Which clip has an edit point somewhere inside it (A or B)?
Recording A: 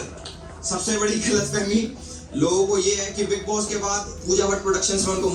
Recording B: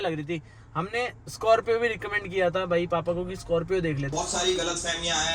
B